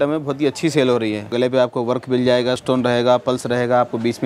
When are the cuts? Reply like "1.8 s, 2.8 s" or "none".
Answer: 1.3 s, 2.6 s